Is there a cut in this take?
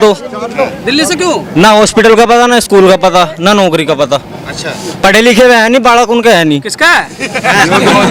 no; 0 cuts

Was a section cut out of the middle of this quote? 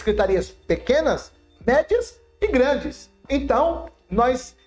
yes; 1 cut; at 3.1 s

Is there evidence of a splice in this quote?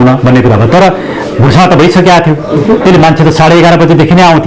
no; 0 cuts

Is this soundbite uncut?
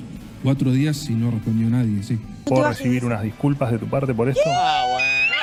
yes; 0 cuts

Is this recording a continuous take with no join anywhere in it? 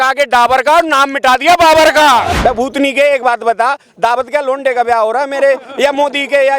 no; 1 cut; at 2.3 s

